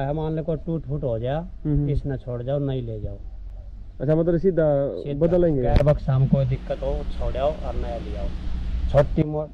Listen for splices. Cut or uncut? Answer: uncut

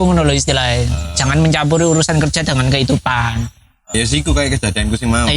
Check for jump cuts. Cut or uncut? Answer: cut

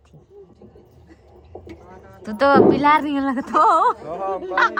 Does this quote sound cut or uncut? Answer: uncut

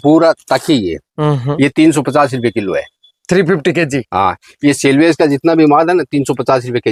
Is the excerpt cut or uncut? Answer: uncut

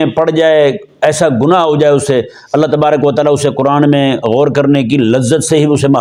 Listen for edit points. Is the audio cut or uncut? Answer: uncut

